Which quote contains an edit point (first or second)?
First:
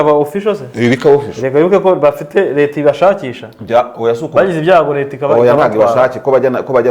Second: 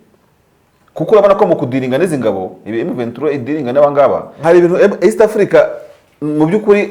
second